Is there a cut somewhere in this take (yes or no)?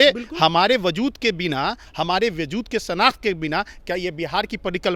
no